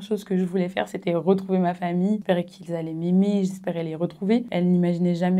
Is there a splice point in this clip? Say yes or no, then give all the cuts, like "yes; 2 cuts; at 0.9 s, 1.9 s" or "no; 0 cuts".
yes; 2 cuts; at 2.2 s, 4.5 s